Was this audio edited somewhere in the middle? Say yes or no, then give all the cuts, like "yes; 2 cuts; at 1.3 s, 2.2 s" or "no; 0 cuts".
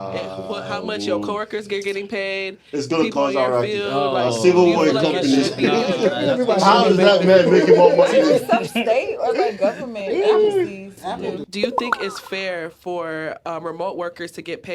yes; 1 cut; at 11.5 s